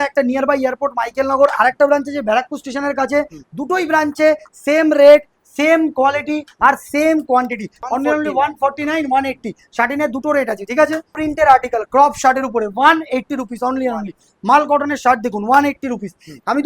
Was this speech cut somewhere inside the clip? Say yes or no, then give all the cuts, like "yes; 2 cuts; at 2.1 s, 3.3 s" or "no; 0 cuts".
yes; 2 cuts; at 7.7 s, 11.2 s